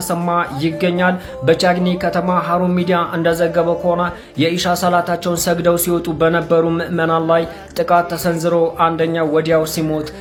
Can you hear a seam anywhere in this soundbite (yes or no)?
no